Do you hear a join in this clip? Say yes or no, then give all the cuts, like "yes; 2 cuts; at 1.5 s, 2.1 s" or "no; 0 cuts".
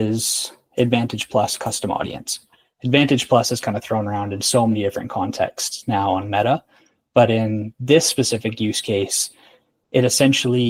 no; 0 cuts